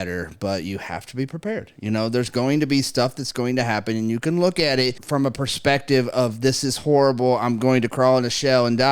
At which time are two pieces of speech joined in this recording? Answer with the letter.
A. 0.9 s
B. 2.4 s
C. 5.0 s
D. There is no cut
C